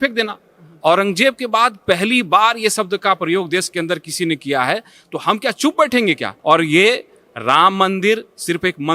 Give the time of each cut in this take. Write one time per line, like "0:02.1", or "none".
0:06.3